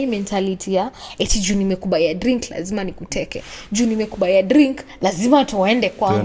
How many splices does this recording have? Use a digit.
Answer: 0